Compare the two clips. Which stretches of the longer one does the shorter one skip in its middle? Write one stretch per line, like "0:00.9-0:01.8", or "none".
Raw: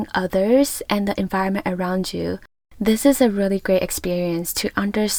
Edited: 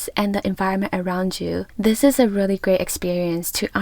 0:02.4-0:02.7